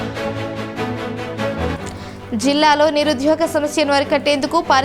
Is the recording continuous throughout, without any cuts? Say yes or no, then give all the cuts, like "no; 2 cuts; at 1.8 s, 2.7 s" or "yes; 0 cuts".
no; 1 cut; at 1.8 s